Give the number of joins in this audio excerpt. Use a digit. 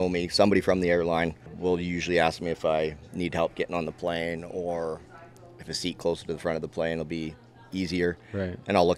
1